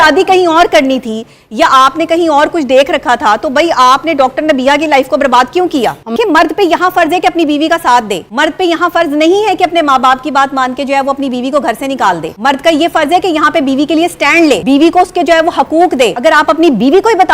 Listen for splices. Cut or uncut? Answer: cut